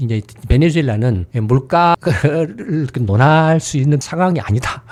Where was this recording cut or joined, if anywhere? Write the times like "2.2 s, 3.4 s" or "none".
none